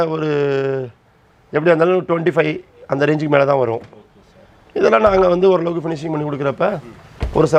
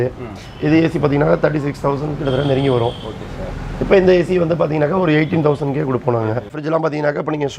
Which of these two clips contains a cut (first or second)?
second